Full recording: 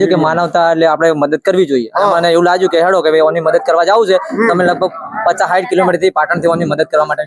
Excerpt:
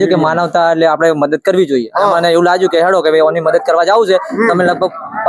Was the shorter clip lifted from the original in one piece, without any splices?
yes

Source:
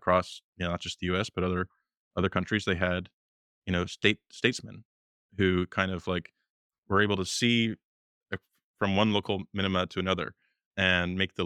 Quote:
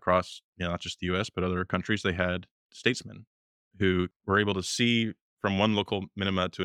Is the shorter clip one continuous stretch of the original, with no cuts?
no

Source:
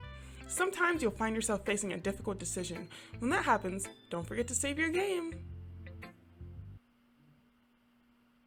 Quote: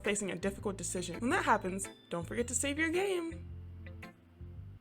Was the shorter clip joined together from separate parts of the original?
yes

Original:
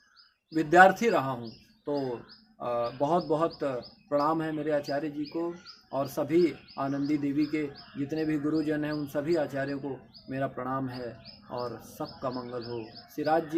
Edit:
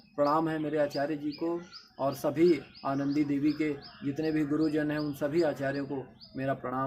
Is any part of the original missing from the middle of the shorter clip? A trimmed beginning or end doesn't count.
no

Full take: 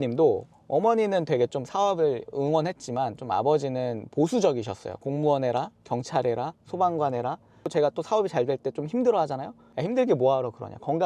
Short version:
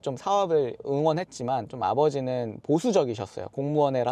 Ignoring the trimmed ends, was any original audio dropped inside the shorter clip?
no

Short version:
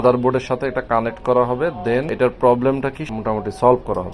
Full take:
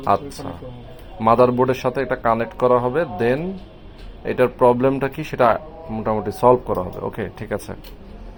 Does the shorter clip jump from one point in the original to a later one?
yes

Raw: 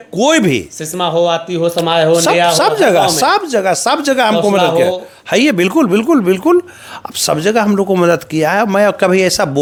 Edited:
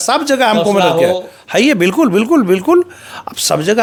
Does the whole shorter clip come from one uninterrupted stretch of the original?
yes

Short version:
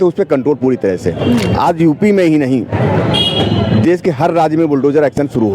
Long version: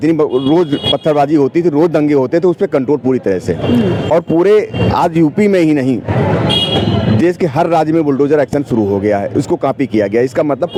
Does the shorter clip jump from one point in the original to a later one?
yes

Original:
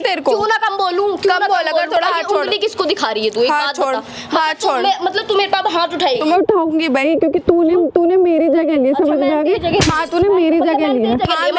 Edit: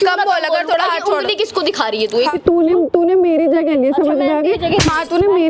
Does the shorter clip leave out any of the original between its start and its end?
yes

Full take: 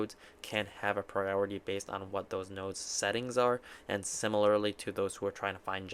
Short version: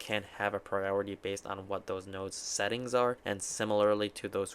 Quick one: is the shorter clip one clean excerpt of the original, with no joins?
no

